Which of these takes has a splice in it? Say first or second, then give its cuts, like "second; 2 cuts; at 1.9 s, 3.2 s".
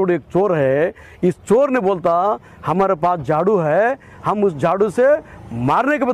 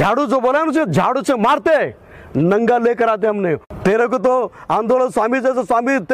second; 1 cut; at 3.6 s